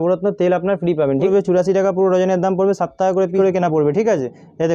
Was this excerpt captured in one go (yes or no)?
no